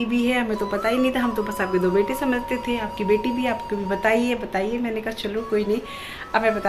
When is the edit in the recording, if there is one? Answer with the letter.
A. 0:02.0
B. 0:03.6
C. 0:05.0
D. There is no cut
D